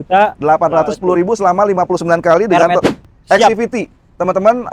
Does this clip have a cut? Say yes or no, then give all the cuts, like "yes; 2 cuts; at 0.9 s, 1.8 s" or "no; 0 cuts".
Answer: yes; 1 cut; at 3.0 s